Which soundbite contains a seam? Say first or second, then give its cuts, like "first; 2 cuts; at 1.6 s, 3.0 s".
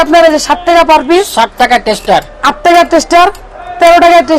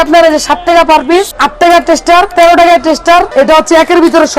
second; 3 cuts; at 1.3 s, 2.3 s, 3.3 s